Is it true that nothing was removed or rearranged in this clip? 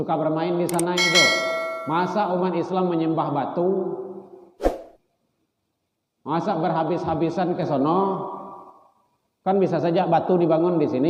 yes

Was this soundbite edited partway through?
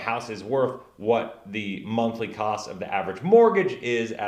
no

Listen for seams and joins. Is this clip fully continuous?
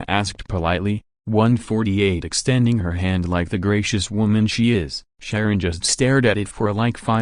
yes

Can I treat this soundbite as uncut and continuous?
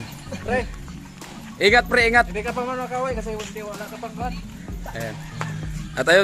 yes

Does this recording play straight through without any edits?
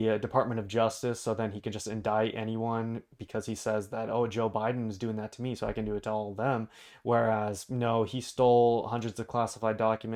yes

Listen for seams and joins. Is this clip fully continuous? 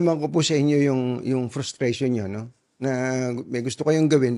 yes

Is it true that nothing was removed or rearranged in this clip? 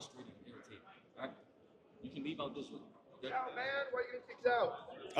yes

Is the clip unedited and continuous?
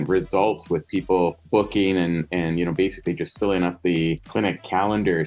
no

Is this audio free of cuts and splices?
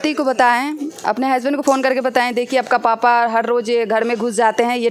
yes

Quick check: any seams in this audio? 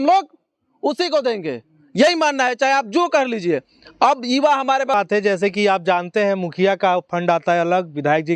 yes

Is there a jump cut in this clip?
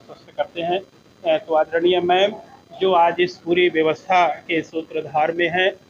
no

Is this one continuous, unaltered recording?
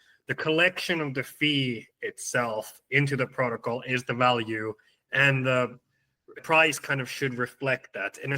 no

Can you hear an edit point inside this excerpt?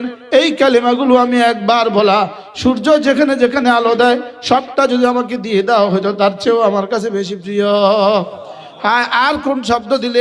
no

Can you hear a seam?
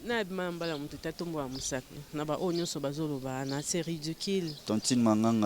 yes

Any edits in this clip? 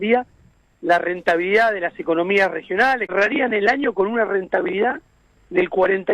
yes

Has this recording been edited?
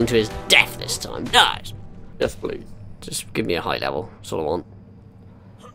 yes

